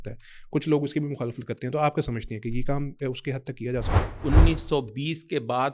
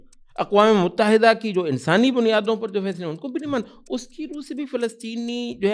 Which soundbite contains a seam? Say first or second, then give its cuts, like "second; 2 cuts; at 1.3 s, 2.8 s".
first; 1 cut; at 4.2 s